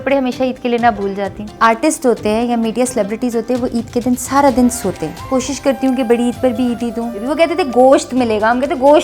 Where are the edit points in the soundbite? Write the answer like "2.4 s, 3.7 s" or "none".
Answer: 1.5 s, 5.2 s, 7.2 s